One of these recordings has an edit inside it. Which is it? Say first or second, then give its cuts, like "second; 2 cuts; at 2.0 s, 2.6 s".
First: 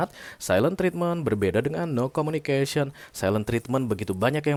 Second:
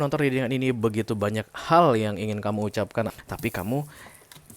second; 1 cut; at 3.1 s